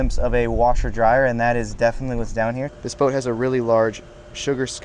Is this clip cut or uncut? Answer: cut